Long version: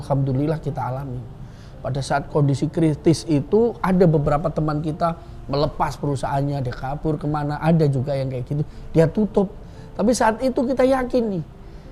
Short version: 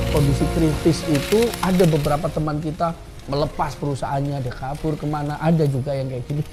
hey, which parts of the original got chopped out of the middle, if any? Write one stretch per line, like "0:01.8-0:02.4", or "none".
none

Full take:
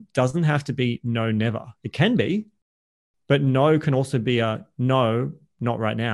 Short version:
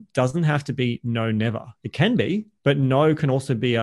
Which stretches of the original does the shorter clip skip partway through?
0:02.5-0:03.2

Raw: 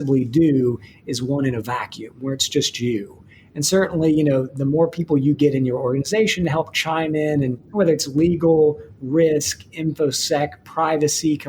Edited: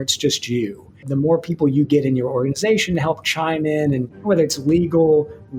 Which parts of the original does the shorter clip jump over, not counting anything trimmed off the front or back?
0:03.4-0:04.5

